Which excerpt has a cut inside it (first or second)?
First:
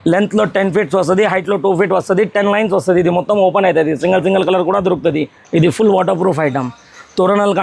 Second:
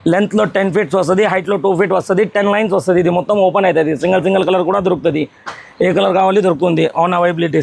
first